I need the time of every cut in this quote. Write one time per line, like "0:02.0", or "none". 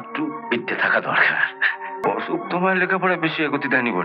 0:02.0